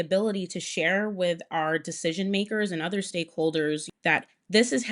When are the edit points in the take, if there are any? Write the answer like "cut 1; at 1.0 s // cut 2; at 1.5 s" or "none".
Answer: cut 1; at 3.9 s